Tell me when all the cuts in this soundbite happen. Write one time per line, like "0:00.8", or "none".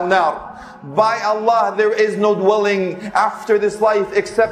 none